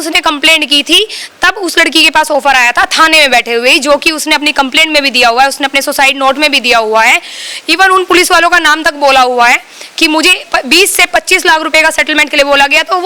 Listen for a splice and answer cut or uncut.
uncut